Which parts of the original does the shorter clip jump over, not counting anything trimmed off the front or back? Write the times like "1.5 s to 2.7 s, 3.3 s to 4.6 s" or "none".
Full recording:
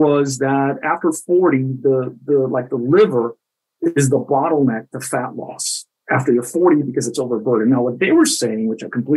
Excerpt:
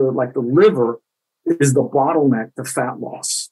none